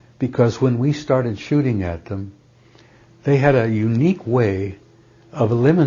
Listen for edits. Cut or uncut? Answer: uncut